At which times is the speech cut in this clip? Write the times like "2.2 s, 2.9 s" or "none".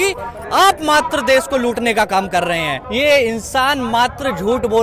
2.8 s